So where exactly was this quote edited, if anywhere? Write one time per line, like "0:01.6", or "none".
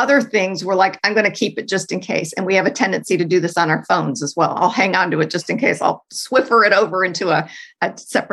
0:06.1